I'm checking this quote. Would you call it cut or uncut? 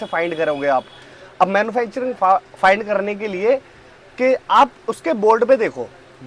uncut